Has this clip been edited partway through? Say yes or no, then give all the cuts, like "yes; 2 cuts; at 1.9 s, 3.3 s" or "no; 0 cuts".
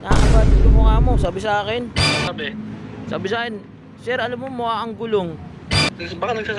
yes; 2 cuts; at 2.3 s, 5.9 s